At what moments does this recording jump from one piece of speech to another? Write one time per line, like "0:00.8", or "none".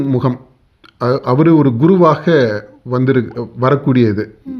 none

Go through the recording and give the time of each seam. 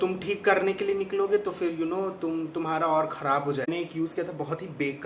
0:03.7

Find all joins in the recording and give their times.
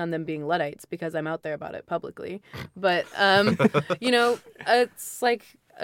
none

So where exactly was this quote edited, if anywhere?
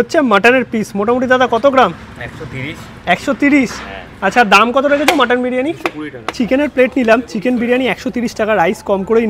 0:06.3

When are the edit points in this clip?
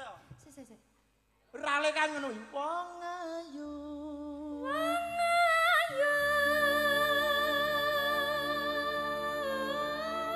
none

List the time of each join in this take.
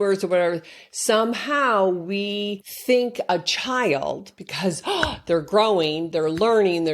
0:02.7

